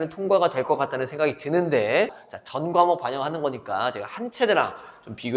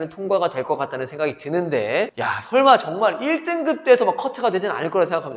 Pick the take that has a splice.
first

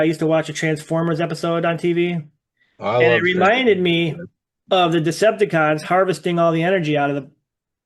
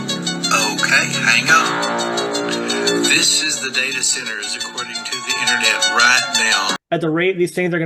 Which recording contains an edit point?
second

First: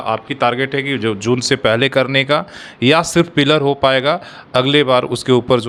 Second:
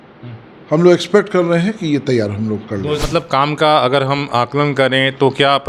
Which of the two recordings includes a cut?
second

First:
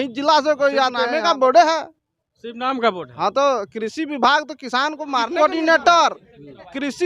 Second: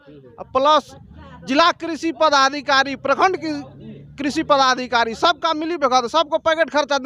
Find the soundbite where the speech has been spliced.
first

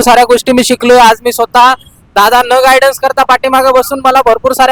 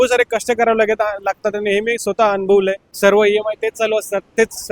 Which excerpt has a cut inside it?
second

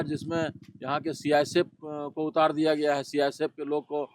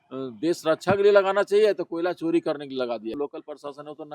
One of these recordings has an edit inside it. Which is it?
second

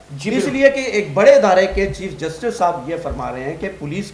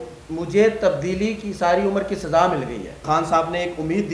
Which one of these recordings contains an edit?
second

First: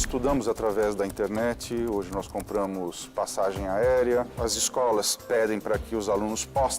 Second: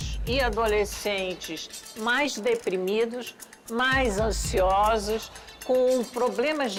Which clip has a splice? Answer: first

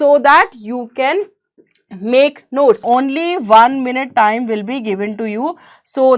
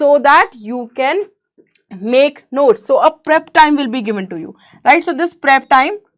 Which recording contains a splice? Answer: first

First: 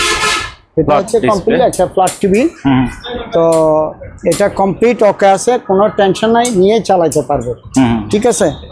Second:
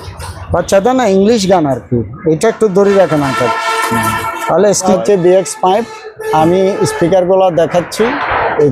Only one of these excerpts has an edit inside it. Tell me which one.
second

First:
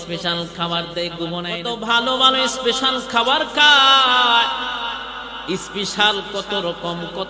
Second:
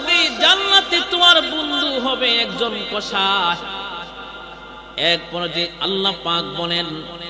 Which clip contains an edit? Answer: first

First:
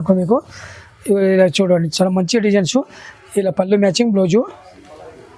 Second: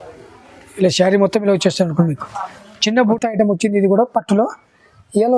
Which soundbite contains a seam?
second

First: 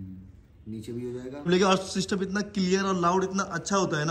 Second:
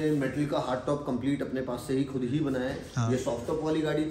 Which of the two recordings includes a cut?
first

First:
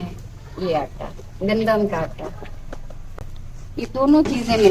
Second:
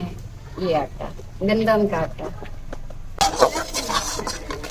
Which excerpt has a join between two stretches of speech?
second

